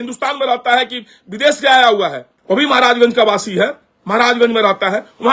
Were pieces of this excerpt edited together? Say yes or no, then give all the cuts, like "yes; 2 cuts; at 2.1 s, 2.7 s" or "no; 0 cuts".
no; 0 cuts